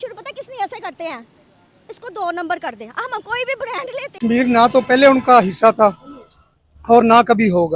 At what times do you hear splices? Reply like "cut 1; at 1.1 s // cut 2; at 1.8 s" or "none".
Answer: cut 1; at 4.2 s

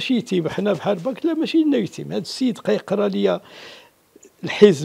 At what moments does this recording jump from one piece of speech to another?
none

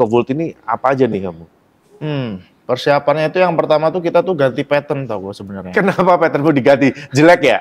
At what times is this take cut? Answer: none

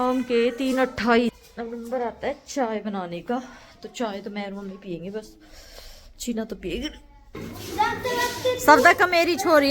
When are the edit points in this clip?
cut 1; at 7.4 s

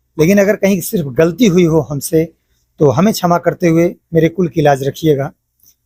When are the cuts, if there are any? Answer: none

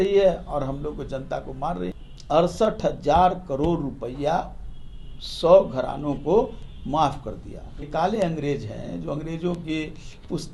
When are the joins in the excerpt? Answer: cut 1; at 2.1 s // cut 2; at 7.9 s

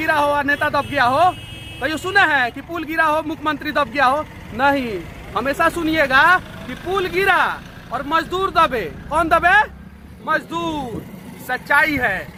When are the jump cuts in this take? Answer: none

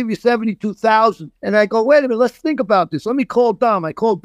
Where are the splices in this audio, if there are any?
cut 1; at 1.3 s

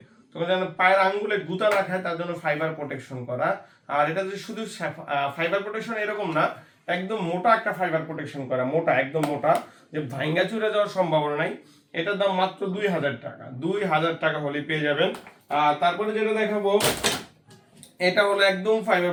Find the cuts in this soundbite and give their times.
none

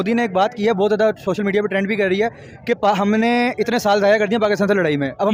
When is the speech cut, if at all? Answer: none

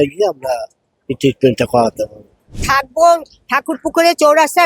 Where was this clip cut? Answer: cut 1; at 2.5 s

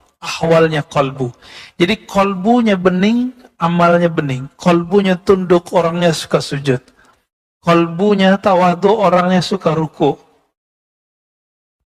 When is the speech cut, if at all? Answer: none

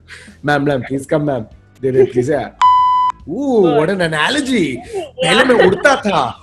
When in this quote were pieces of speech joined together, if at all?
cut 1; at 2.8 s

